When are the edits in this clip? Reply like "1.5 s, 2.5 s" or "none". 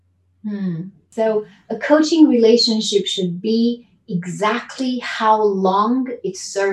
1.0 s